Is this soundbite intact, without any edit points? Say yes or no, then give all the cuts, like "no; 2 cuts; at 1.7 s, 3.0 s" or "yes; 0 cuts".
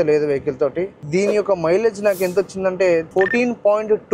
no; 1 cut; at 1.0 s